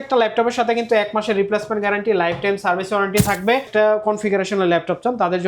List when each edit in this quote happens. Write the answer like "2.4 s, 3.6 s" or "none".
3.7 s